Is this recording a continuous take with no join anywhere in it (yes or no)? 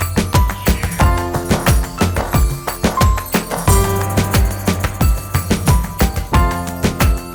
yes